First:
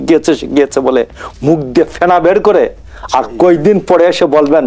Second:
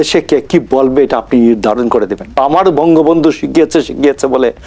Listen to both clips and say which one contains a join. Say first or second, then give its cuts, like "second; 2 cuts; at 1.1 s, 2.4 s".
second; 1 cut; at 2.4 s